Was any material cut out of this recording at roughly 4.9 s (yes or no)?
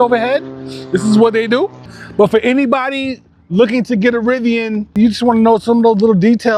yes